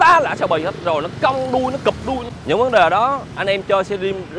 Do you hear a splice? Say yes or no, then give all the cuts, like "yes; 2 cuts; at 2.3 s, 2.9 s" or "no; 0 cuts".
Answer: yes; 1 cut; at 2.3 s